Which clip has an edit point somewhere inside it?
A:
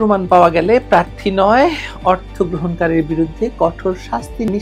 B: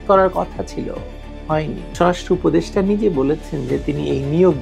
B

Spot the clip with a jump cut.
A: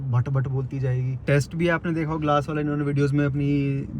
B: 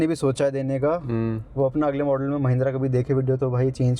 A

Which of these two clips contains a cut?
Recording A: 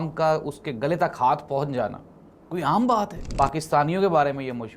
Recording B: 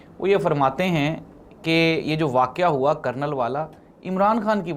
A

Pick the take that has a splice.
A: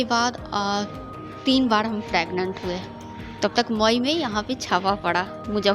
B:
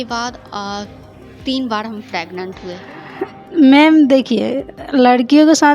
B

